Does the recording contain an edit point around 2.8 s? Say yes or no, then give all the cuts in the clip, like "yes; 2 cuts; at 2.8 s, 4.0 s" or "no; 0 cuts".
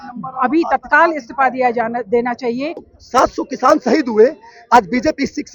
yes; 1 cut; at 2.8 s